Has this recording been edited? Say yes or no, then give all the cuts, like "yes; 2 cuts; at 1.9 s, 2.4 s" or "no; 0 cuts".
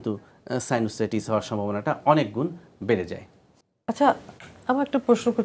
no; 0 cuts